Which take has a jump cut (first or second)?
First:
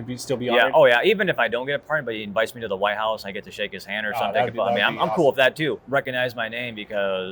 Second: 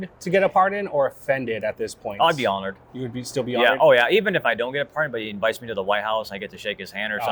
first